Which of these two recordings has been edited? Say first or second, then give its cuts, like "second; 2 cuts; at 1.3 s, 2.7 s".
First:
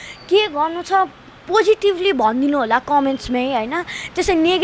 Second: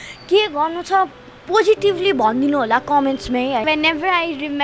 second; 1 cut; at 3.6 s